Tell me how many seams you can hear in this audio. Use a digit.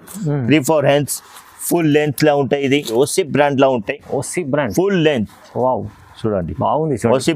1